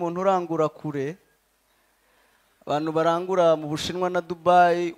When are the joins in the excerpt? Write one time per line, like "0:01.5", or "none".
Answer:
none